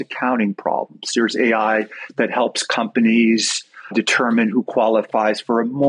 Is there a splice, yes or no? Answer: yes